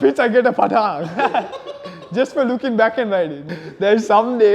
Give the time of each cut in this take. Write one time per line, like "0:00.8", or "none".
0:03.5